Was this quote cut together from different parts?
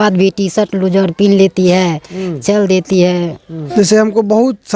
yes; 1 cut; at 3.5 s

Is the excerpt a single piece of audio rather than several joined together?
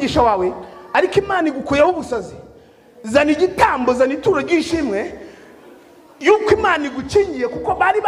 yes; 0 cuts

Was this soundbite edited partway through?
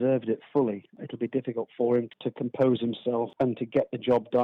yes; 3 cuts; at 1.0 s, 2.1 s, 3.3 s

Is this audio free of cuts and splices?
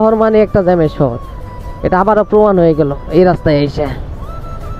yes; 0 cuts

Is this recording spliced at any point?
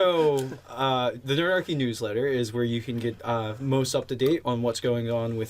yes; 1 cut; at 4.4 s

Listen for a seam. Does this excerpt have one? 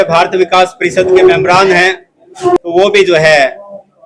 yes; 1 cut; at 2.6 s

